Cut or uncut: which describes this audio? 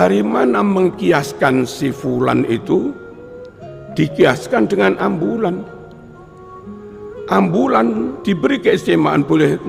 cut